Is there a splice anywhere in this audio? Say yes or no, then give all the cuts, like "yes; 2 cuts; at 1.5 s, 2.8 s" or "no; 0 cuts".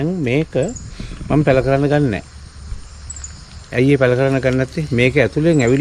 no; 0 cuts